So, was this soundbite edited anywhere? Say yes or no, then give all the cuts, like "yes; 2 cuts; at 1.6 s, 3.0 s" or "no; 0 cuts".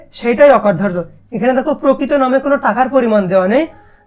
no; 0 cuts